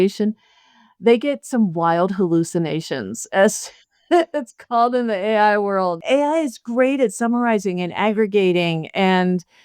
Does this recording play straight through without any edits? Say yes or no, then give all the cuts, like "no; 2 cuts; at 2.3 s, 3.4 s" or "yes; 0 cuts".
no; 1 cut; at 6.0 s